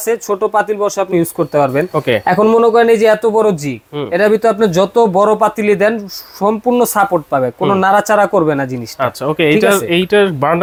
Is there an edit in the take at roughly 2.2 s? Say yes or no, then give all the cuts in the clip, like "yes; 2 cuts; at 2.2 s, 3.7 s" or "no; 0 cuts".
no; 0 cuts